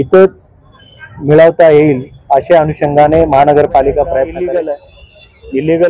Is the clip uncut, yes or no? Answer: no